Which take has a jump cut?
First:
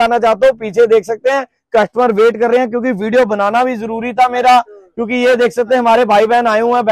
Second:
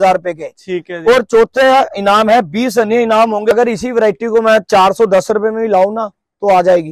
second; 1 cut; at 3.5 s

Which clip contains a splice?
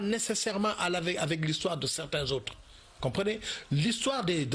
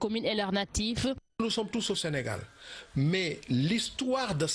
second; 1 cut; at 2.3 s

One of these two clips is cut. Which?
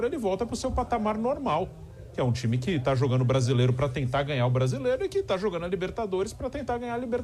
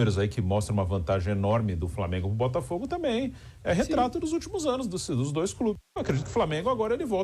second; 1 cut; at 5.8 s

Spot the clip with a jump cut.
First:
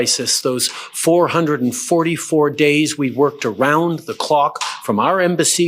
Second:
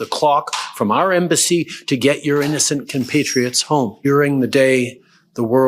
second; 1 cut; at 4.0 s

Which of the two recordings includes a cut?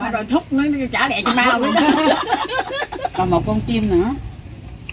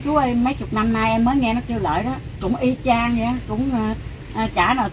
first; 1 cut; at 3.1 s

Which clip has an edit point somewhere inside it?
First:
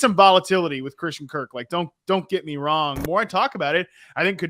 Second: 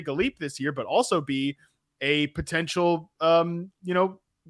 first; 1 cut; at 3.0 s

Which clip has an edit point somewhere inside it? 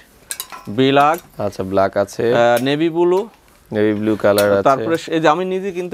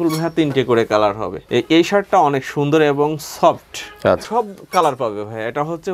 second; 2 cuts; at 1.3 s, 4.2 s

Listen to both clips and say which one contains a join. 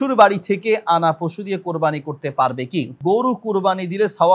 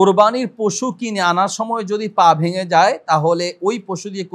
first; 1 cut; at 2.9 s

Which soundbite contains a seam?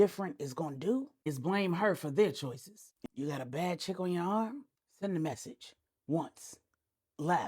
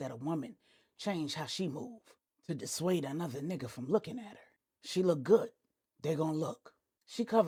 first; 1 cut; at 2.9 s

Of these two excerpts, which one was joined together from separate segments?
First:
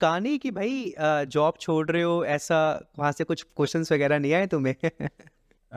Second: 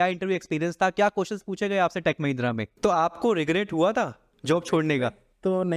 second; 2 cuts; at 2.7 s, 4.3 s

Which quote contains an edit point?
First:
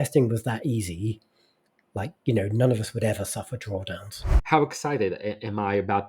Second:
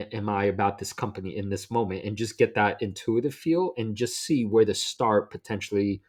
first; 1 cut; at 4.3 s

